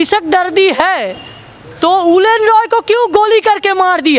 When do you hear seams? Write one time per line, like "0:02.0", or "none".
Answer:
none